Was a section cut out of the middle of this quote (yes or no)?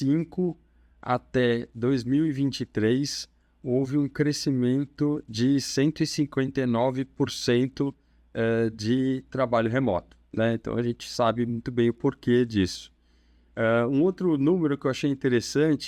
no